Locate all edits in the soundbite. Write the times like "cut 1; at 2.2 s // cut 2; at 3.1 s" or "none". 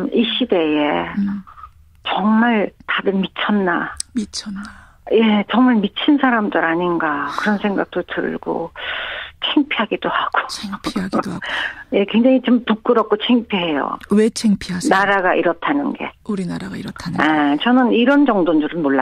none